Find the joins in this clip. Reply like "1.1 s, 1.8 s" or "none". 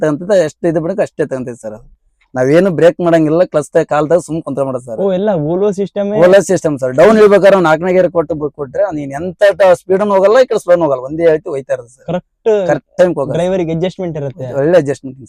none